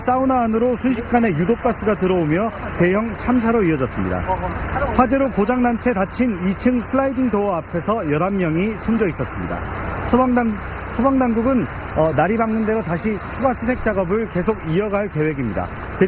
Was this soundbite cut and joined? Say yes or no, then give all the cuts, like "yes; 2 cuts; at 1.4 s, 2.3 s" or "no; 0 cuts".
no; 0 cuts